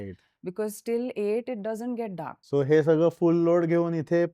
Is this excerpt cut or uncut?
cut